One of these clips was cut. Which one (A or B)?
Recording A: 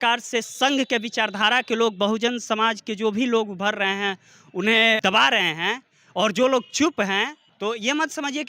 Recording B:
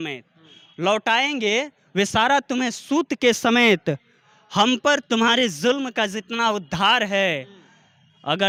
A